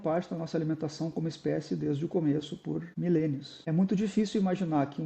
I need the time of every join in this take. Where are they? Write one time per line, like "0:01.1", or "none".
0:02.9
0:03.5